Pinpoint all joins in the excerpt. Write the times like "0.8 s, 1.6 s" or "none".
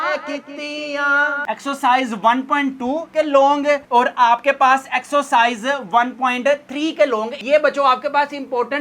1.4 s, 7.4 s